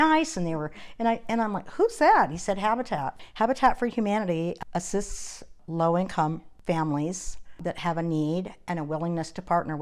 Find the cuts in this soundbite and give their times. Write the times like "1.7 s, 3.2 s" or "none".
3.2 s, 4.6 s, 5.6 s, 6.5 s, 7.6 s